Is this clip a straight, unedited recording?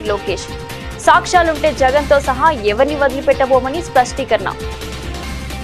yes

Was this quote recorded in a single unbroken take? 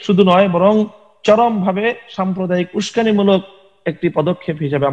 yes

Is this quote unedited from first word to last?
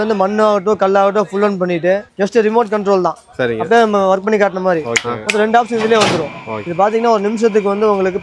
yes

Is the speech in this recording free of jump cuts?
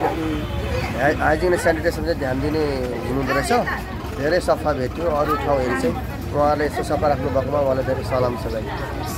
yes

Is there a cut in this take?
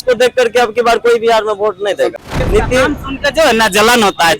yes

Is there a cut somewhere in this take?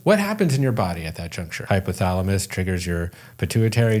yes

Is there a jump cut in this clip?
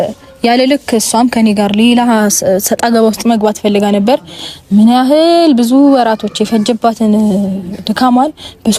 no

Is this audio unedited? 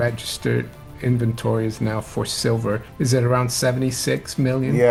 yes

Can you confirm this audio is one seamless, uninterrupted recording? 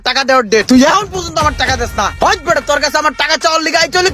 no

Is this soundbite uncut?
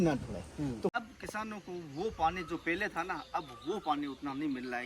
no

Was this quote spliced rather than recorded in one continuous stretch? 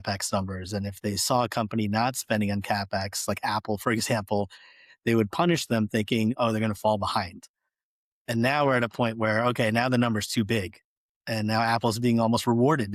no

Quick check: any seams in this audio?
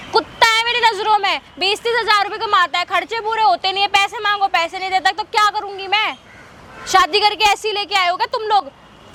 no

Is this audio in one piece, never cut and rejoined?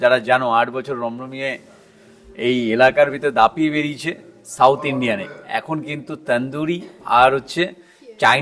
yes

